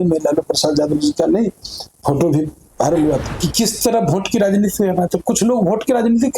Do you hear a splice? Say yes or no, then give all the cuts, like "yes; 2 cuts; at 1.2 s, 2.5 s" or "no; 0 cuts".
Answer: yes; 1 cut; at 3.4 s